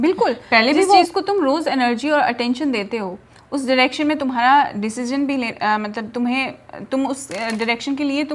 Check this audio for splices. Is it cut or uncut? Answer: uncut